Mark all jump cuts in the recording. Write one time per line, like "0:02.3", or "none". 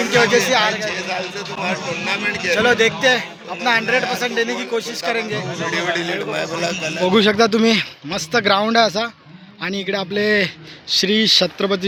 none